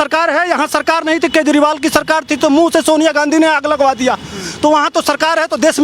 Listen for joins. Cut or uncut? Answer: uncut